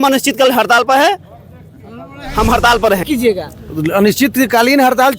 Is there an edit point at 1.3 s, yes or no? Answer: no